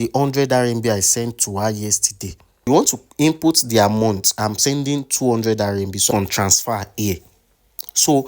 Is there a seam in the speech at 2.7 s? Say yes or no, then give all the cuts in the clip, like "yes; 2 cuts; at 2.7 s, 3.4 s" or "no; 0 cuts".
yes; 2 cuts; at 2.7 s, 6.1 s